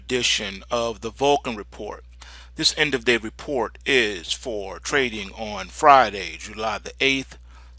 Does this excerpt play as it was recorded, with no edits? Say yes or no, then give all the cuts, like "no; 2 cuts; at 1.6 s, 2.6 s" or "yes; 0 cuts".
yes; 0 cuts